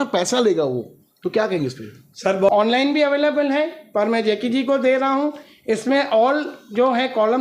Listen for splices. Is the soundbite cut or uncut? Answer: cut